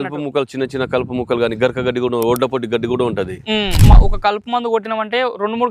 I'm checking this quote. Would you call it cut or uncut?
cut